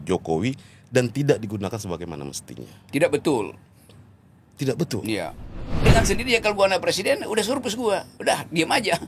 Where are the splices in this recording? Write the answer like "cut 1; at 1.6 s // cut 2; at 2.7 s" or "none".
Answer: cut 1; at 5.7 s